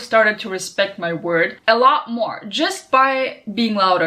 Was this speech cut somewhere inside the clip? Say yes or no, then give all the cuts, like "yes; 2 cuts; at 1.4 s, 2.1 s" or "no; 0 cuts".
yes; 1 cut; at 1.6 s